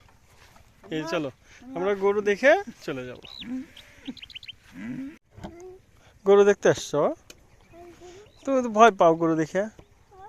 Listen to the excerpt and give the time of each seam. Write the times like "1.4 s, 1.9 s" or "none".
5.3 s